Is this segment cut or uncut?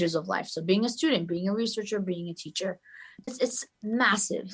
cut